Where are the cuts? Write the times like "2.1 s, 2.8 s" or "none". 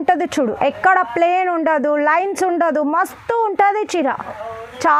none